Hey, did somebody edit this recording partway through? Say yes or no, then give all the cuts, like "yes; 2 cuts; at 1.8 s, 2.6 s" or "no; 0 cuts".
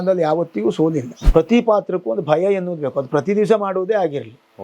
yes; 1 cut; at 1.1 s